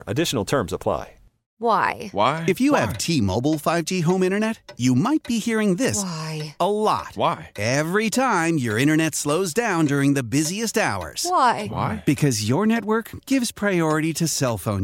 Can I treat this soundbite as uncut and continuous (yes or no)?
no